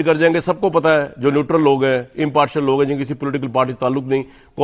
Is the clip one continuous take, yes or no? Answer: yes